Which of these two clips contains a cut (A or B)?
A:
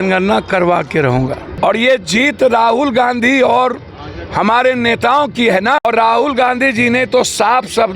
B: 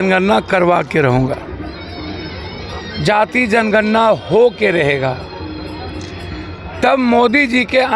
A